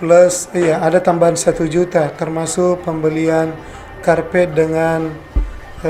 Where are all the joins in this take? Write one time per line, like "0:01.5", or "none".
none